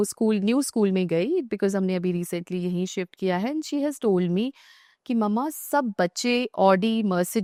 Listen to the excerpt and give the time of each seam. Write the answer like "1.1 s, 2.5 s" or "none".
none